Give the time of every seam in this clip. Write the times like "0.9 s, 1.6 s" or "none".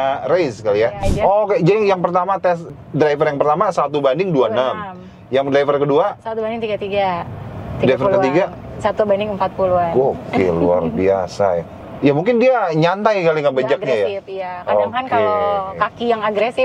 1.0 s, 2.7 s, 11.7 s